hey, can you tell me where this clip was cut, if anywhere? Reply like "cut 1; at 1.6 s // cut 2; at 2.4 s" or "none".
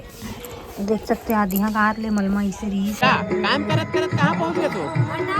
cut 1; at 3.0 s